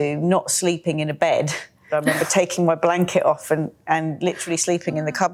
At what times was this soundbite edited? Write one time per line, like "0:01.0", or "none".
0:01.9